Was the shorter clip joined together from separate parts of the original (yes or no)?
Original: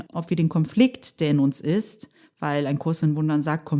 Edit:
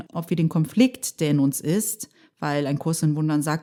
no